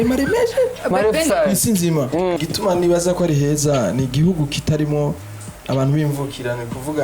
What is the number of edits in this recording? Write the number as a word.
one